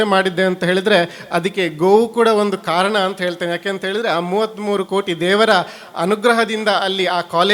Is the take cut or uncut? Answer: uncut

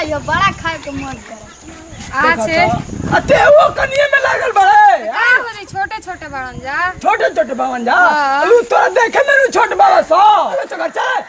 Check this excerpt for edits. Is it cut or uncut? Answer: cut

